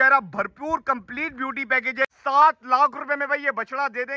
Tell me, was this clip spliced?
yes; 1 cut; at 2.2 s

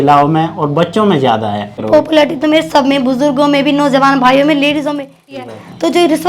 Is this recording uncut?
no; 2 cuts; at 1.8 s, 5.4 s

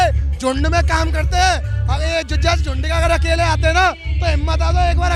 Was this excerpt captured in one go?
yes; 0 cuts

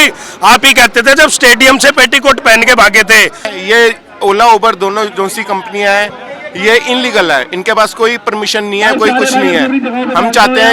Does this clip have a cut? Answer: yes; 1 cut; at 3.5 s

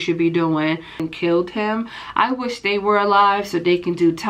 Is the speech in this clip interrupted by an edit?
yes; 1 cut; at 1.0 s

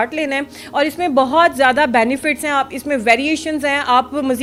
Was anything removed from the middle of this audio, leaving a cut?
no; 0 cuts

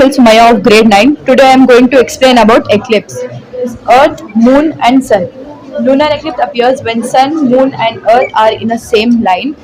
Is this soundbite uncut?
yes; 0 cuts

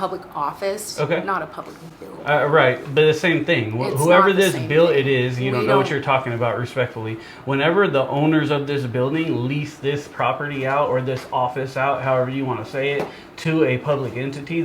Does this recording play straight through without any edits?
yes; 0 cuts

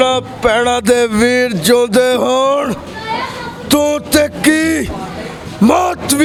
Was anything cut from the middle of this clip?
no; 0 cuts

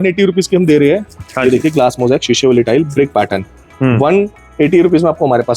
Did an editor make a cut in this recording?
no; 0 cuts

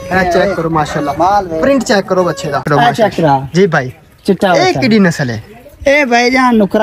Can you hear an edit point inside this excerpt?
yes; 1 cut; at 2.7 s

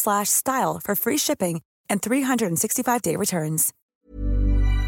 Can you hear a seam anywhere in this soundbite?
yes; 1 cut; at 3.8 s

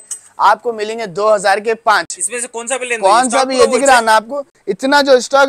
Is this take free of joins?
yes; 0 cuts

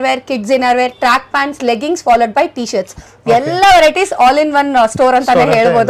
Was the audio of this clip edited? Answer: no; 0 cuts

